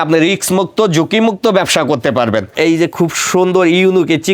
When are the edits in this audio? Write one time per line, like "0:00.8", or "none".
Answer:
0:02.5